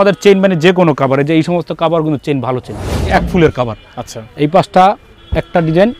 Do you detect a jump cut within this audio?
yes; 1 cut; at 3.1 s

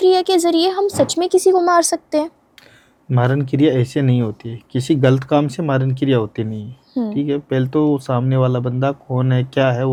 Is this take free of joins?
yes; 0 cuts

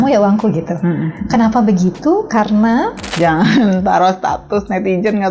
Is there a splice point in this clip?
yes; 1 cut; at 3.0 s

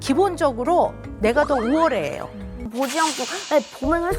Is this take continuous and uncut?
no; 1 cut; at 2.7 s

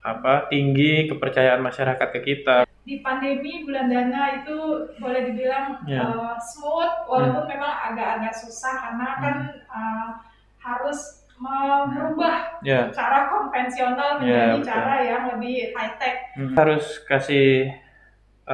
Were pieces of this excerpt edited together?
yes; 2 cuts; at 2.7 s, 16.6 s

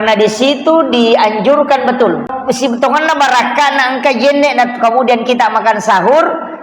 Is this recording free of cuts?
no; 1 cut; at 2.4 s

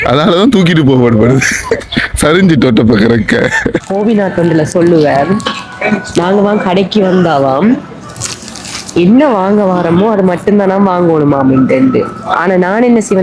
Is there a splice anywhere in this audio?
yes; 1 cut; at 3.9 s

